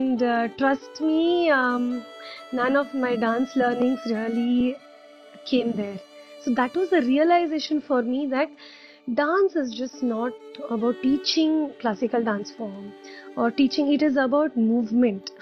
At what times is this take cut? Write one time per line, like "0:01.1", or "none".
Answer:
none